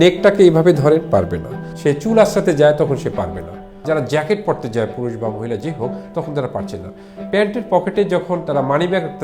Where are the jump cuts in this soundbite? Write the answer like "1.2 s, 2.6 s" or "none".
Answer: 1.7 s, 3.8 s